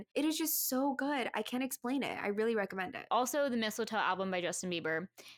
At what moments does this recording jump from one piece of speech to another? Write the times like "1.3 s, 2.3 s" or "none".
3.0 s